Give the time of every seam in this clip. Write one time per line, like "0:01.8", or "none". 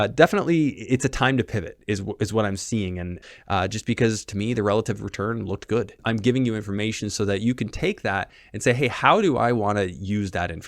0:03.2
0:06.0